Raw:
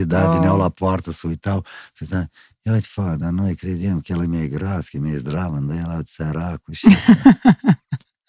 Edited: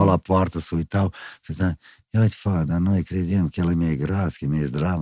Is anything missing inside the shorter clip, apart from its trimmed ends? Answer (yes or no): no